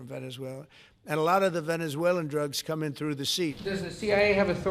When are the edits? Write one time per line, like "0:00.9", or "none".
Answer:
0:03.6